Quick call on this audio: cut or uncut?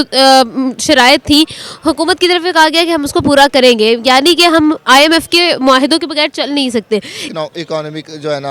cut